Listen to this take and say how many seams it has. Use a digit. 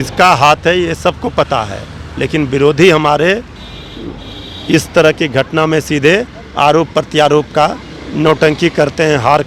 0